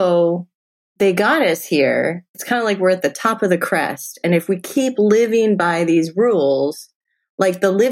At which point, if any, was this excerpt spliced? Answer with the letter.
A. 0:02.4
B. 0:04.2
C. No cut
A